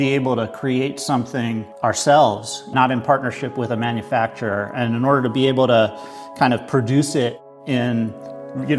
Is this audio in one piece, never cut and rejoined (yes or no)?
no